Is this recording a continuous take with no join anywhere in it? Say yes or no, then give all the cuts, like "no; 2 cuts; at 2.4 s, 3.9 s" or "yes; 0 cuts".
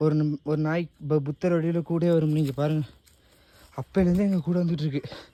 yes; 0 cuts